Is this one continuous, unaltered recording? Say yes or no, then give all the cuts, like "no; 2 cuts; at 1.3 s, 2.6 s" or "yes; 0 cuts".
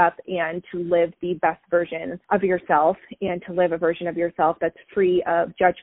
no; 1 cut; at 2.1 s